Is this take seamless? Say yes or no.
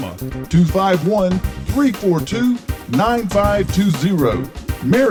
yes